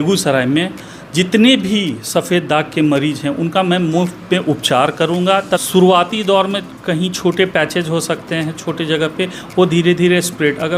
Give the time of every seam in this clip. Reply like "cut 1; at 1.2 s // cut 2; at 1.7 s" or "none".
cut 1; at 5.6 s